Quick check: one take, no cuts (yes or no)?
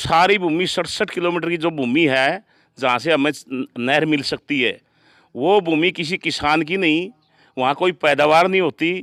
yes